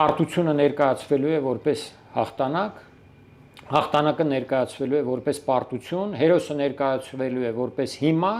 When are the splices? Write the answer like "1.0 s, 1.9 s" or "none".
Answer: none